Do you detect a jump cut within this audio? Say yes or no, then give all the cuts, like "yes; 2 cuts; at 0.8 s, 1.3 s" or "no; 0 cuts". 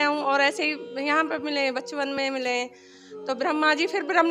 no; 0 cuts